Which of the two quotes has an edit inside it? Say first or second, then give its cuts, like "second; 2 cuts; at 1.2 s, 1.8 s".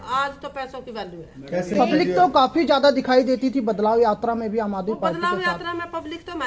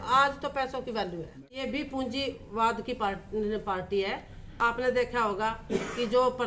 second; 2 cuts; at 1.4 s, 4.8 s